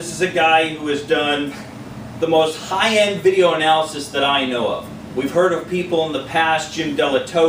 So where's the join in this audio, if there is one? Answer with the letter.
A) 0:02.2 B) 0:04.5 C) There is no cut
A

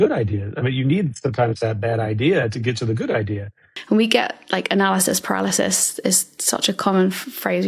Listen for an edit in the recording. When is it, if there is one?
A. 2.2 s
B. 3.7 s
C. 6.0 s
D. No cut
B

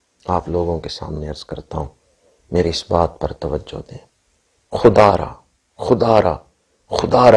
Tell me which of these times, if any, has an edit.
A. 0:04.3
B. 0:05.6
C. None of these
C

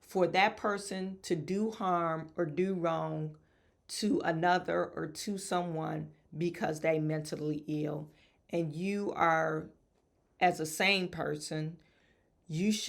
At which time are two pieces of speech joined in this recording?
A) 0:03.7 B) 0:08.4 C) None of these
C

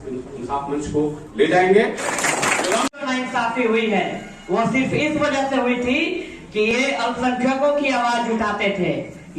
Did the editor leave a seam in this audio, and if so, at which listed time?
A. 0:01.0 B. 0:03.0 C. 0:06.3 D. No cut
B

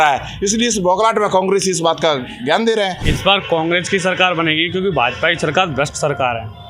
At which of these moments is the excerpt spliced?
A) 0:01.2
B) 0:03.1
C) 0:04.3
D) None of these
B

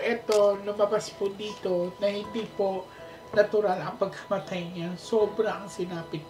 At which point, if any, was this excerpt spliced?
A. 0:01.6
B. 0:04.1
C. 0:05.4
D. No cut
D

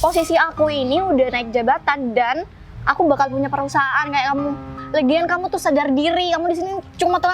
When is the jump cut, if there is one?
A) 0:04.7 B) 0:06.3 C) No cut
A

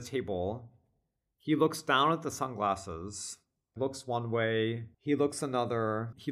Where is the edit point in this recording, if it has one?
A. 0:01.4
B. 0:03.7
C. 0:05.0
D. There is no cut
B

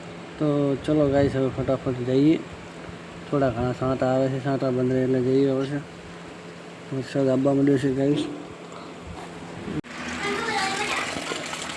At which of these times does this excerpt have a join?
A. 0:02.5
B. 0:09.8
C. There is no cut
B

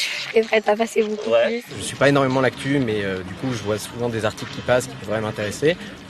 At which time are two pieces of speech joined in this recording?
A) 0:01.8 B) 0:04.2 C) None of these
A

